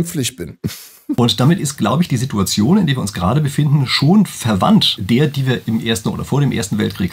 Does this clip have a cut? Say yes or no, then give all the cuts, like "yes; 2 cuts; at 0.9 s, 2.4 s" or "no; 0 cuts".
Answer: yes; 2 cuts; at 1.2 s, 4.9 s